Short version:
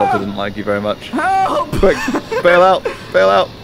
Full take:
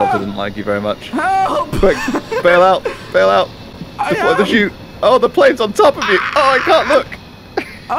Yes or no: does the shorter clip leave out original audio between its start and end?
no